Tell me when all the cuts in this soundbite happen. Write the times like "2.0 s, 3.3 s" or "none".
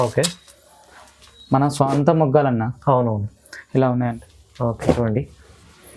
4.1 s